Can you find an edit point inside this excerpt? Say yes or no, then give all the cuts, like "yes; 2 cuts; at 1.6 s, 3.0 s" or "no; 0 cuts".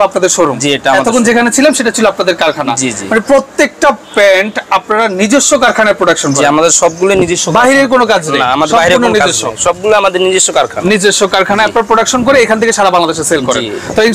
no; 0 cuts